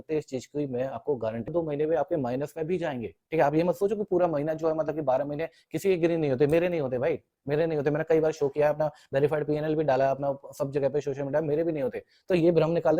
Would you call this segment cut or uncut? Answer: cut